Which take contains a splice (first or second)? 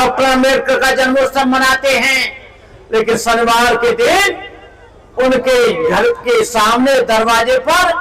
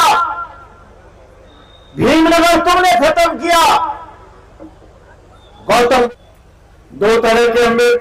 second